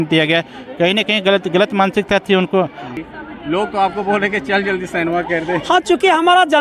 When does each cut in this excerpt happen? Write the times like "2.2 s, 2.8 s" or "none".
2.9 s